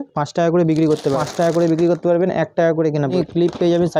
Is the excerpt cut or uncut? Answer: cut